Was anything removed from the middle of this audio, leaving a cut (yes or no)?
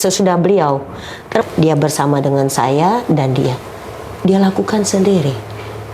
yes